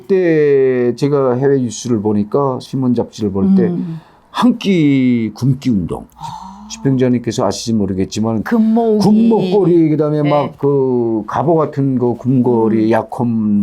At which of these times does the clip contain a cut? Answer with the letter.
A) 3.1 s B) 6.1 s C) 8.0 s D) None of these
B